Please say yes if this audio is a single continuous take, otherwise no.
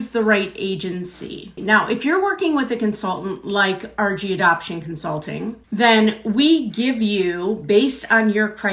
no